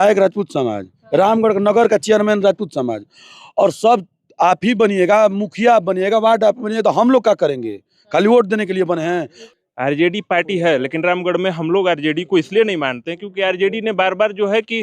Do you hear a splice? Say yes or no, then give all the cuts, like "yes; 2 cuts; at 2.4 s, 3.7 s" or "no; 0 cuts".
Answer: yes; 2 cuts; at 1.0 s, 9.4 s